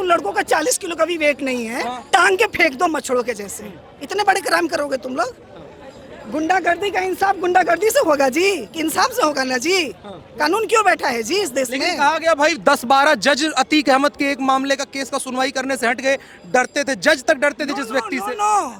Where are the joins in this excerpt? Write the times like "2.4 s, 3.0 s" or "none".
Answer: none